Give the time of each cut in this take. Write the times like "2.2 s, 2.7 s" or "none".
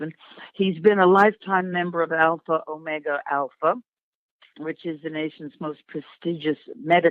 5.0 s